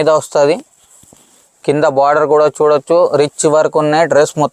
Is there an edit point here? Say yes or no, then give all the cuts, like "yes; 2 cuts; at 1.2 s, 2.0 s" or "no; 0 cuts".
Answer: no; 0 cuts